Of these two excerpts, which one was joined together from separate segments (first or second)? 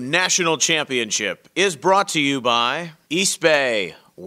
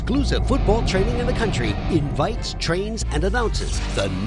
first